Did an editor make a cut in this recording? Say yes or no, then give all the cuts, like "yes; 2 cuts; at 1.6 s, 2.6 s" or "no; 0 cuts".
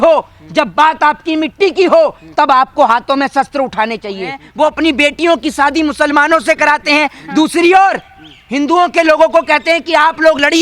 yes; 1 cut; at 4.4 s